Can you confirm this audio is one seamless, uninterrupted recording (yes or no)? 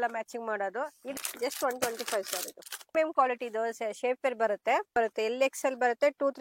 no